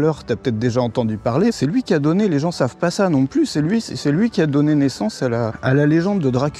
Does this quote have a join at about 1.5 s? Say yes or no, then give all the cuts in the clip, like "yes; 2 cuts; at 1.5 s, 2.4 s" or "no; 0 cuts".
yes; 2 cuts; at 1.5 s, 5.5 s